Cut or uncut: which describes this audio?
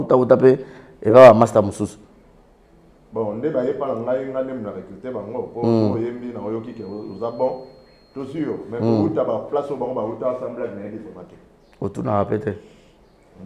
uncut